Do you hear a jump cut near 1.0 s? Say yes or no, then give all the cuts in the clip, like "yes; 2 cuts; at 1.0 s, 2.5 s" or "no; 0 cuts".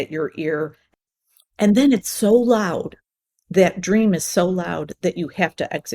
yes; 1 cut; at 1.0 s